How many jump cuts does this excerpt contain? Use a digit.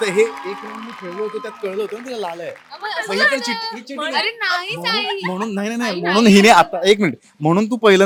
0